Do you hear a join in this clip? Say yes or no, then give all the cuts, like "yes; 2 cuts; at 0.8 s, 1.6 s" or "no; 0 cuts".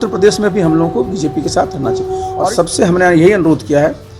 yes; 1 cut; at 2.3 s